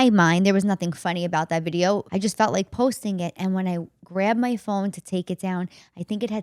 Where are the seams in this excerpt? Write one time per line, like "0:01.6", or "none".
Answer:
0:02.1